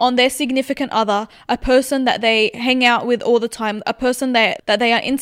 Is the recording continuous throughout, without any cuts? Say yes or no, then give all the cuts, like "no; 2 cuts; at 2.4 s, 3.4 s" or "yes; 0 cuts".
yes; 0 cuts